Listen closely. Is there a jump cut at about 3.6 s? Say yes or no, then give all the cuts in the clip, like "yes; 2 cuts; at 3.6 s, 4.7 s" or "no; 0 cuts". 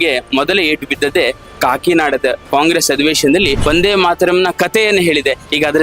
yes; 2 cuts; at 2.4 s, 3.6 s